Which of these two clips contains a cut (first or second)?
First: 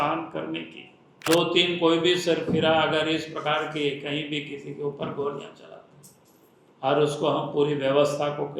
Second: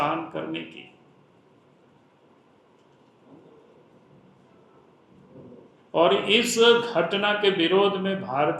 first